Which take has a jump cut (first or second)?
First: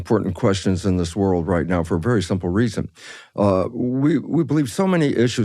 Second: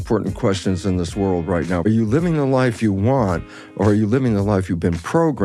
second